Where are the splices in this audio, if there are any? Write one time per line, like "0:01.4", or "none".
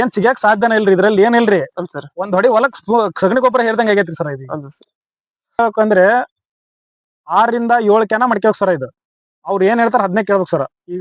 0:05.6